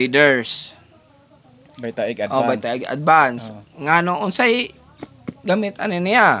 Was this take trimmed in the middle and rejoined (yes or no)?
no